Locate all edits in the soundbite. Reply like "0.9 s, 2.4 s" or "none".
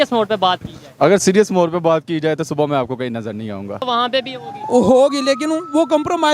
3.8 s